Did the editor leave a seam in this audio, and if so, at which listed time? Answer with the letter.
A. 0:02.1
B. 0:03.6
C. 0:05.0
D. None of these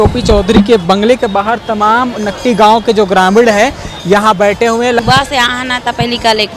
C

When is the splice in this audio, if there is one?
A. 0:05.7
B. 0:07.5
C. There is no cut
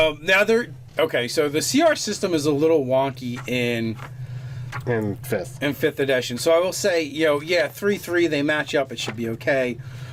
C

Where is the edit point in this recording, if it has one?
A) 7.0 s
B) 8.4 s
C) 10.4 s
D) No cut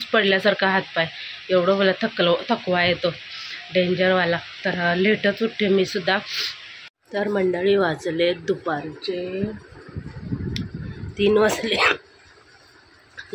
A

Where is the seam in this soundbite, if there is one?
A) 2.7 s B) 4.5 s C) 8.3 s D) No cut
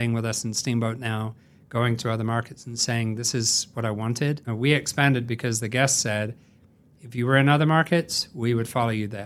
B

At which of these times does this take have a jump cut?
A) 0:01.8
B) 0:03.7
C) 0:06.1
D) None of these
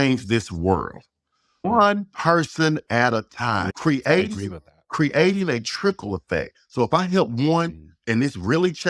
B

